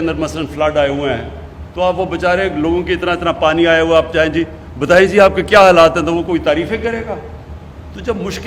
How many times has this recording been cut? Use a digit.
0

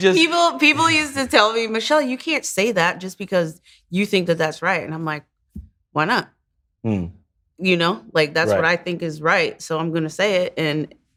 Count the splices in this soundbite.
0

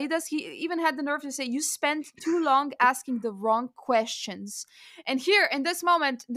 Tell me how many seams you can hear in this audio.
0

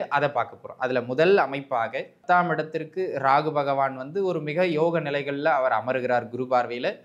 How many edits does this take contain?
1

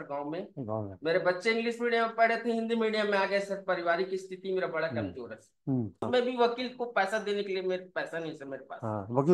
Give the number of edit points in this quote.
1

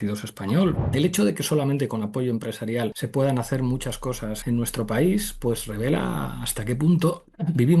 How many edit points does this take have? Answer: 3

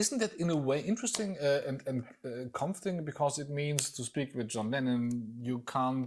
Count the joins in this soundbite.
0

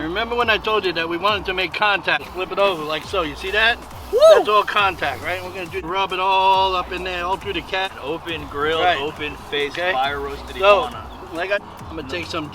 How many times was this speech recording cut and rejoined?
4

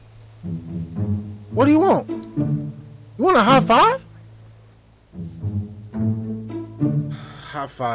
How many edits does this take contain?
0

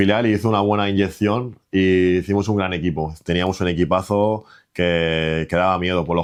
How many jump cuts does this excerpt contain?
0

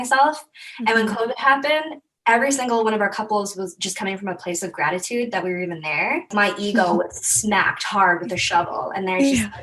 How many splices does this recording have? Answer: 1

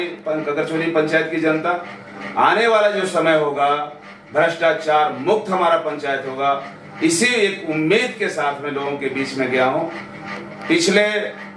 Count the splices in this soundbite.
0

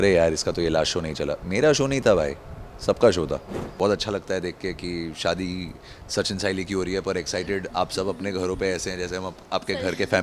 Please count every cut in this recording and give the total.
1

